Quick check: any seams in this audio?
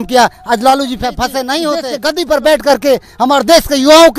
yes; 1 cut; at 1.9 s

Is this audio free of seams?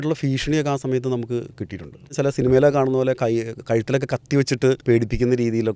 no; 2 cuts; at 2.1 s, 4.8 s

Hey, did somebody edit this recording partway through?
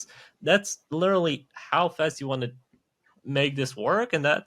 no; 0 cuts

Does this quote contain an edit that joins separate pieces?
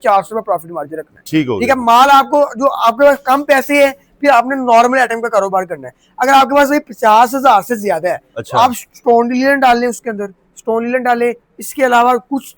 no; 0 cuts

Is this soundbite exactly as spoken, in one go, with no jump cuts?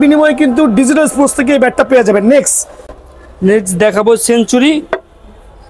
yes; 0 cuts

